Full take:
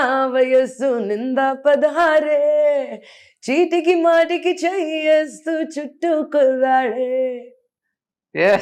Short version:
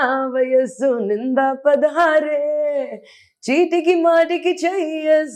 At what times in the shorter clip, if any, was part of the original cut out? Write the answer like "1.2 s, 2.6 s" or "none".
none